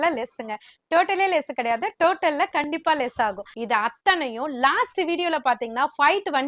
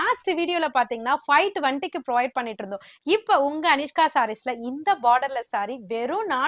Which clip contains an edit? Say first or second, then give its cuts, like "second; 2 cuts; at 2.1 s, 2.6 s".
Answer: first; 1 cut; at 3.5 s